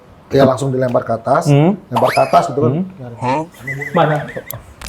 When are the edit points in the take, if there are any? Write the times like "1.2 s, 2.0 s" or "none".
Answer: none